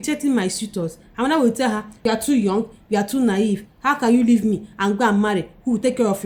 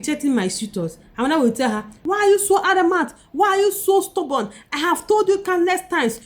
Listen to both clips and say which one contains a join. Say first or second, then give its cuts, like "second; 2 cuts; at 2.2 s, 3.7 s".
second; 1 cut; at 1.9 s